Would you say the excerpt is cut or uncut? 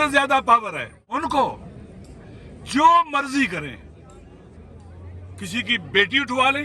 cut